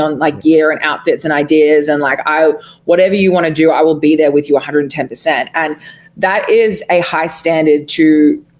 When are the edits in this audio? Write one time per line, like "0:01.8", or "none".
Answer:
none